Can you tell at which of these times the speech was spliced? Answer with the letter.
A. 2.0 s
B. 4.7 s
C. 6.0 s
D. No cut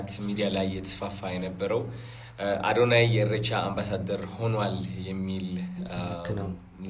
D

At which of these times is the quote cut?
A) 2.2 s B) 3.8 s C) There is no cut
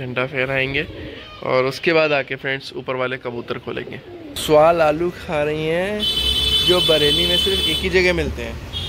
B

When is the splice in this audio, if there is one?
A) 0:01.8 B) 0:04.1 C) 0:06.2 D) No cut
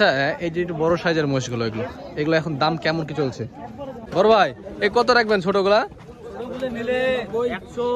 B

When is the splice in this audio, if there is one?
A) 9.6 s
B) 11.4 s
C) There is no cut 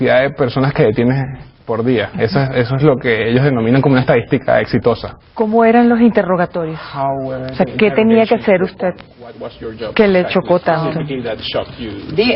B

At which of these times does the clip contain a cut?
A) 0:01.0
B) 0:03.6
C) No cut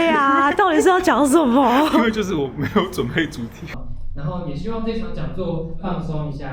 B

